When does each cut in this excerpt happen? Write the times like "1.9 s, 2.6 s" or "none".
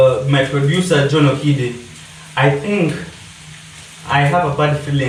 none